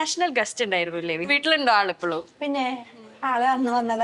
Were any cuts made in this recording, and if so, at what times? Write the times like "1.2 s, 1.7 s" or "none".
1.2 s